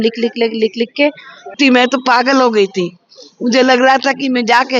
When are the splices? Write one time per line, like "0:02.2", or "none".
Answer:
0:01.6